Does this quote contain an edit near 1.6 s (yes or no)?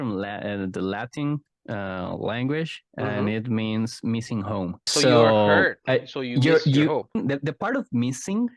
no